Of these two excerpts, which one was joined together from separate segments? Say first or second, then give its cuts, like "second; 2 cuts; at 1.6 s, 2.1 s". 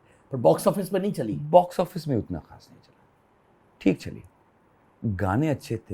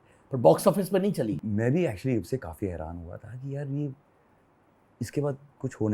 second; 1 cut; at 1.4 s